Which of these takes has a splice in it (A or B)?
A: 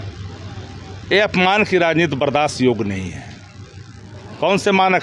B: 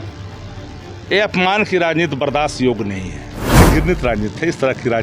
B